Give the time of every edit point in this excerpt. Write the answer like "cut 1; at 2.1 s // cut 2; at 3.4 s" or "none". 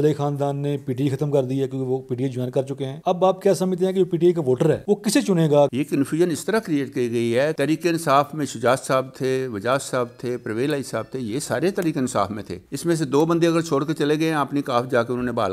none